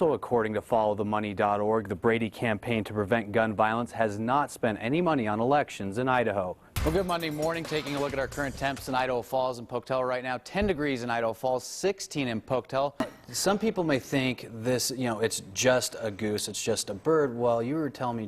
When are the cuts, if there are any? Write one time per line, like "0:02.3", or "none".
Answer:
0:06.7
0:13.0